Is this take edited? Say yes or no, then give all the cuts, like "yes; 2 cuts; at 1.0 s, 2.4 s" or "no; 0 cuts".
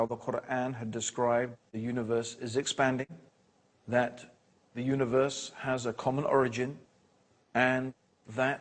no; 0 cuts